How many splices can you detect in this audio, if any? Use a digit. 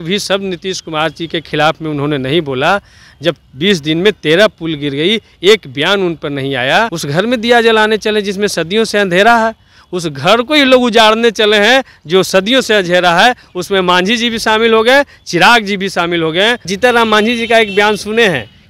2